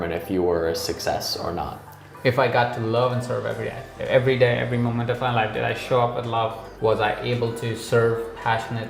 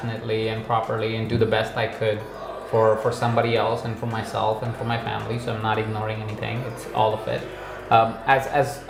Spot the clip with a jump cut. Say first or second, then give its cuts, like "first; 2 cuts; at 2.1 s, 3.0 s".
first; 2 cuts; at 3.9 s, 6.6 s